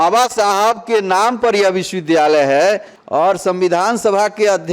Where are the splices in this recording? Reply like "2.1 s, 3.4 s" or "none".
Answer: 2.9 s